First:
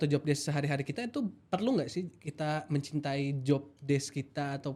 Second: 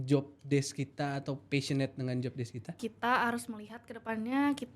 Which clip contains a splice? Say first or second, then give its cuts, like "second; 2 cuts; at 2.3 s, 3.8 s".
second; 1 cut; at 2.7 s